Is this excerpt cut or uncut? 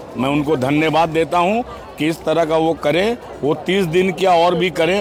uncut